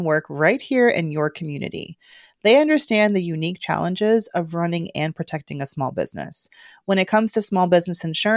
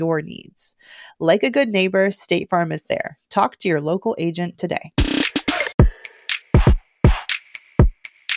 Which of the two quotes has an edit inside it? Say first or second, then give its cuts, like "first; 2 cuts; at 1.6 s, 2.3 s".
second; 1 cut; at 5.7 s